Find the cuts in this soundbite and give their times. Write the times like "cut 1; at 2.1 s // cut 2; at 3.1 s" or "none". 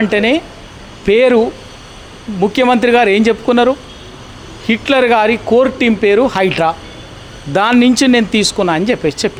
none